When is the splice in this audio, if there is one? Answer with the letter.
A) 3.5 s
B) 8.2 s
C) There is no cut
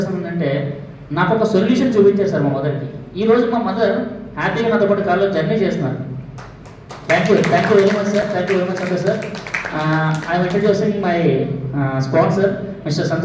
C